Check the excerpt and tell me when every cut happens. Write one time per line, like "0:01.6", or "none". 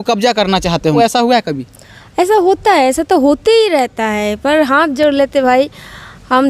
0:01.0